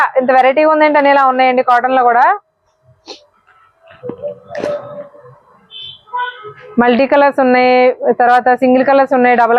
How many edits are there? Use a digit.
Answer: 0